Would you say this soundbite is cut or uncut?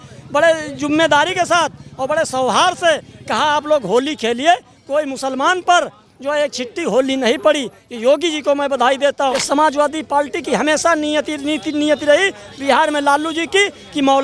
cut